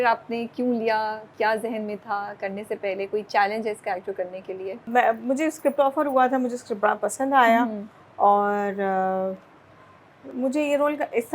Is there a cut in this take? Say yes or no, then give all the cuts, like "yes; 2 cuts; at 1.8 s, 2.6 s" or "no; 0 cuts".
no; 0 cuts